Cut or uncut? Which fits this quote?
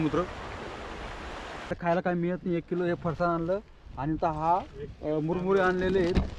cut